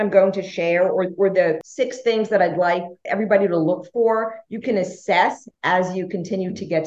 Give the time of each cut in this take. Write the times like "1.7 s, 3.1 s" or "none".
1.7 s, 3.0 s